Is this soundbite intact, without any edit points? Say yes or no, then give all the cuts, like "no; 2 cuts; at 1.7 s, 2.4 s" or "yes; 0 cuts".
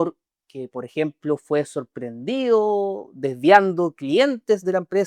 yes; 0 cuts